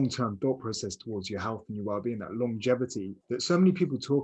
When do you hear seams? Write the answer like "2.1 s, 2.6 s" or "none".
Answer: 3.1 s